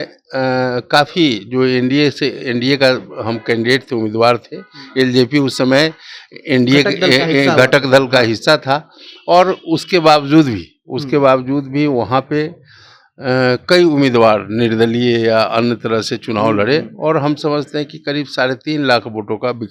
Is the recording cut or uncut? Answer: uncut